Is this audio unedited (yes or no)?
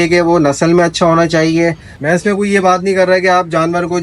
no